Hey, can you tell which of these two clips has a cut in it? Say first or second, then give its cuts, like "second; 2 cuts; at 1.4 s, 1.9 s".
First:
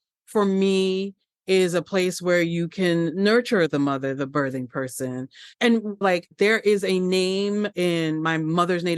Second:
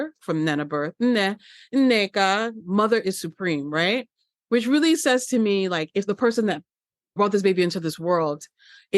second; 2 cuts; at 6.1 s, 7.1 s